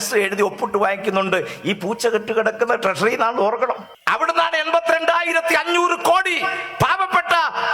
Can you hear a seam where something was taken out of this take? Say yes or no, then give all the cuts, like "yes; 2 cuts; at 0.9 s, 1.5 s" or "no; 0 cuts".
yes; 1 cut; at 3.9 s